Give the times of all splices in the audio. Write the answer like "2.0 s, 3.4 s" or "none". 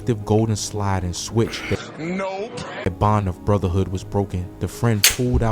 2.9 s

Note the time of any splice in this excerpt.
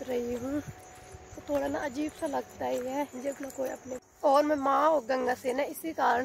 4.0 s

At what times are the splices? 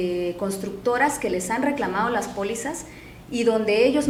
none

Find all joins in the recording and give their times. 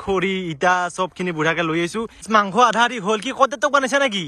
2.2 s

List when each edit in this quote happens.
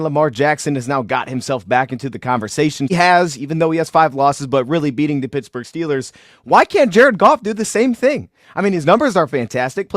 2.9 s

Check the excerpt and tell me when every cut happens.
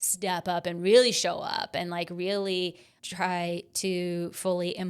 2.9 s

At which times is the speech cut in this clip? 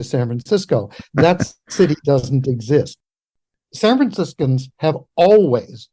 3.0 s

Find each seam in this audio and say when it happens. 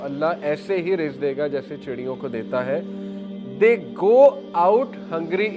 none

